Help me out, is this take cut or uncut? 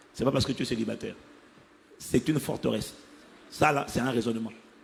uncut